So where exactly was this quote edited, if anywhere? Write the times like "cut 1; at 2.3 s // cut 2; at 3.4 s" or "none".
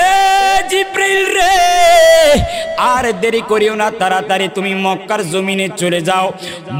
none

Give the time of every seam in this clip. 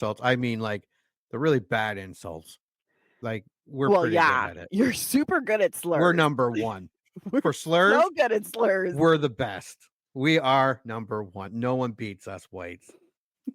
cut 1; at 3.1 s

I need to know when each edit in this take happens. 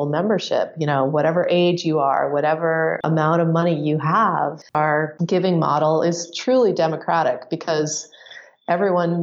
cut 1; at 5.0 s

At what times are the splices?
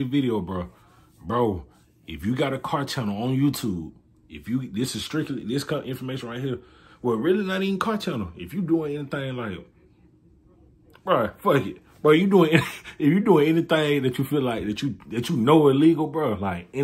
none

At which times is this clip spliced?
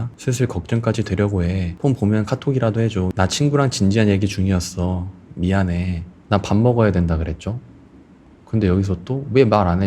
cut 1; at 3.1 s // cut 2; at 6.1 s

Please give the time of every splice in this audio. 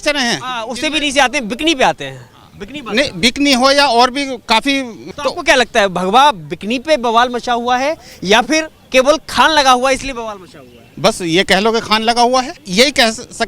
cut 1; at 5.0 s // cut 2; at 8.8 s // cut 3; at 12.6 s

